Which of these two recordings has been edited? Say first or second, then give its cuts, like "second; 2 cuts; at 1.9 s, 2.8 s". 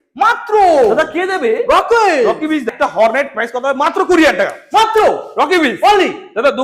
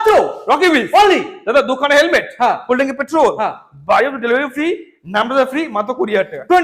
first; 1 cut; at 2.7 s